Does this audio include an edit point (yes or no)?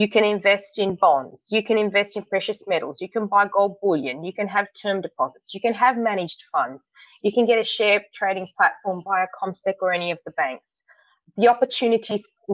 no